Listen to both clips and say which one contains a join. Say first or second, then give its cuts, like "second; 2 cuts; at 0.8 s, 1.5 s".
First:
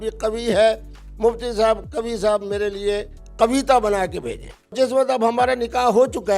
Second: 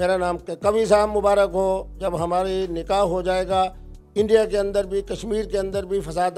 first; 1 cut; at 4.7 s